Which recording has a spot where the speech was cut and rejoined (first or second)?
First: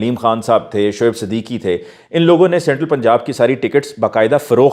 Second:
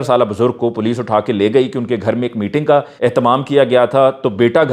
second